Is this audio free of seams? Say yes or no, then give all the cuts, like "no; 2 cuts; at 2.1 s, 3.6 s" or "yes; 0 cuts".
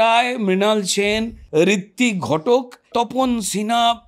no; 2 cuts; at 1.4 s, 2.9 s